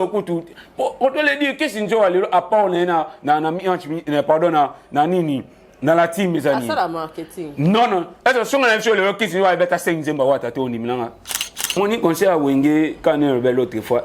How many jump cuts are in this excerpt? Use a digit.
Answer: 1